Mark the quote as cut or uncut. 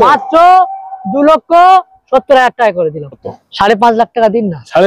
cut